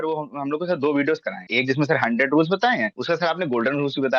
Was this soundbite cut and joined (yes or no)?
yes